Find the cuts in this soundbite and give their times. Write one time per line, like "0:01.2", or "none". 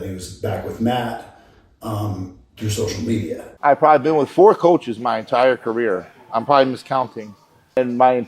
0:03.4